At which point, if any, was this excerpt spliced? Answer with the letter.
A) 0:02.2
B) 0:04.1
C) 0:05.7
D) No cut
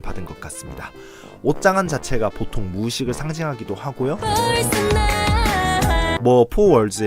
D